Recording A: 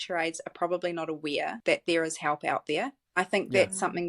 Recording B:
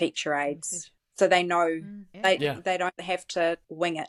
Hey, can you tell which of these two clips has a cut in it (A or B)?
A